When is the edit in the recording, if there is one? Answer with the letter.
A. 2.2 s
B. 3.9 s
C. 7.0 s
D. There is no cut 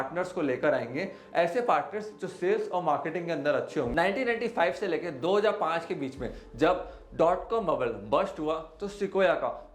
B